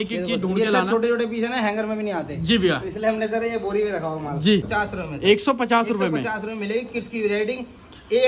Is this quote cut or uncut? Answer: cut